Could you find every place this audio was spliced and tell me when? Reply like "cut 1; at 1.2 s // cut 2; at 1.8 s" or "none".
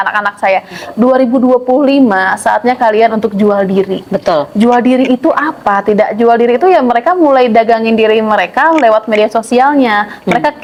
none